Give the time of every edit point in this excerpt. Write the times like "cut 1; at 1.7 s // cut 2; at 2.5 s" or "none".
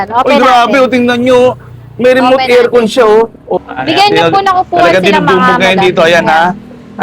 cut 1; at 3.6 s